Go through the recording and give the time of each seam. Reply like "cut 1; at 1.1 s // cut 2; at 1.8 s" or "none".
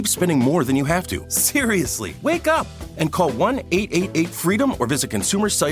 cut 1; at 1.7 s